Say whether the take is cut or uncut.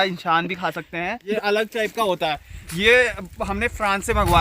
cut